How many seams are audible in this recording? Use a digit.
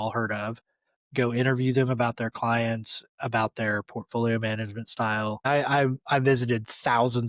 1